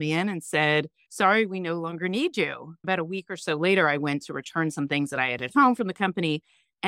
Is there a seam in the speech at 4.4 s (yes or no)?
no